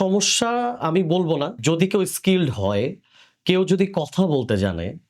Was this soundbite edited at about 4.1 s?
no; 1 cut; at 1.5 s

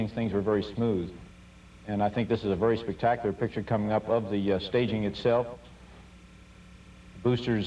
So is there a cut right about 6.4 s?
no; 1 cut; at 2.8 s

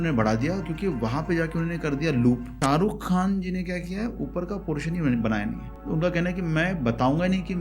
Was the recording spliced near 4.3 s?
no; 2 cuts; at 2.5 s, 5.7 s

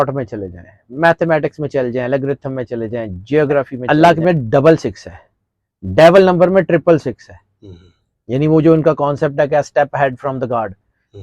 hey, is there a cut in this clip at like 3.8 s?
yes; 1 cut; at 3.8 s

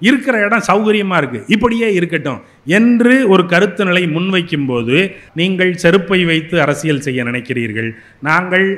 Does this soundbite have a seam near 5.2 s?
yes; 1 cut; at 5.2 s

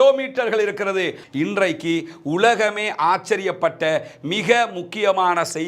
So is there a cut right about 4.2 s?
no; 1 cut; at 1.2 s

